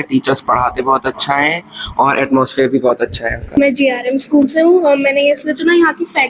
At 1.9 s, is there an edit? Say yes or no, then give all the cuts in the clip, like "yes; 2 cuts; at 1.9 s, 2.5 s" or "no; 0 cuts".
no; 0 cuts